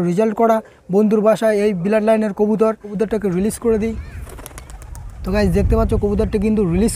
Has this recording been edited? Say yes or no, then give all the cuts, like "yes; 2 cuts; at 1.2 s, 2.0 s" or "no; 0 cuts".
yes; 1 cut; at 2.9 s